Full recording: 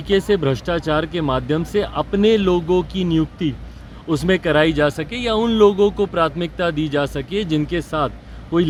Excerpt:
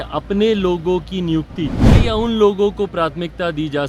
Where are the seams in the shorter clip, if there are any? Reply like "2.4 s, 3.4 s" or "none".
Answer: 1.9 s